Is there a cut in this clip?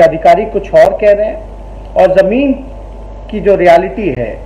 no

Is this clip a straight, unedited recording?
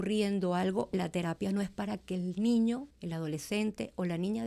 no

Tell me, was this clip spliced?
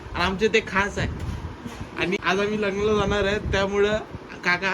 yes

